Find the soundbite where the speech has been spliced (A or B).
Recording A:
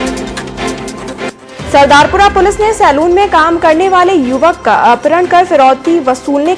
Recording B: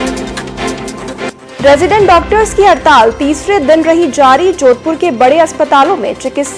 B